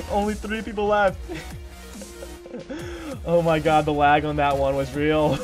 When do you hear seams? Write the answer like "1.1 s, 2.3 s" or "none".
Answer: none

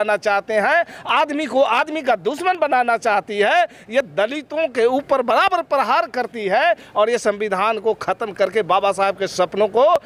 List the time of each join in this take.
none

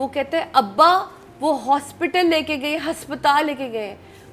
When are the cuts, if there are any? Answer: none

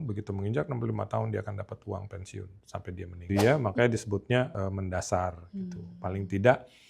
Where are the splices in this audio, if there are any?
3.2 s

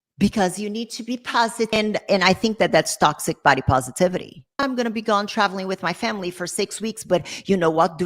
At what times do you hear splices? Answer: 1.8 s, 4.6 s

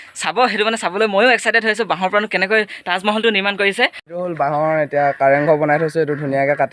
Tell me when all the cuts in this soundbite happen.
4.0 s

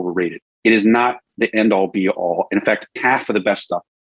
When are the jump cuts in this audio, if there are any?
2.9 s

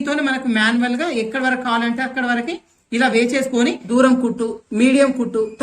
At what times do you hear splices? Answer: 3.9 s

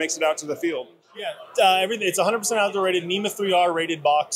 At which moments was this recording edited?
1.0 s

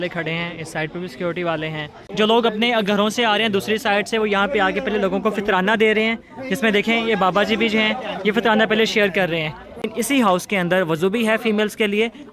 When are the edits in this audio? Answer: 2.0 s, 9.8 s

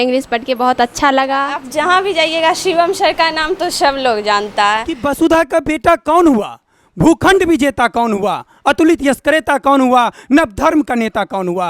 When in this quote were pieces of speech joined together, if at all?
1.6 s, 4.9 s

